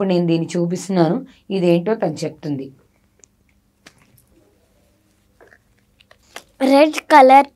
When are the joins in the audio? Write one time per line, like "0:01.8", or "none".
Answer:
0:06.2